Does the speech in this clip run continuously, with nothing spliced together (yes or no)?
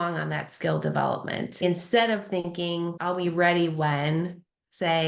no